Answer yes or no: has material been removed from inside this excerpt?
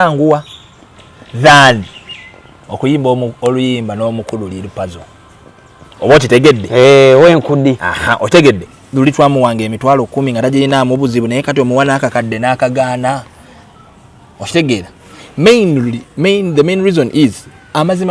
yes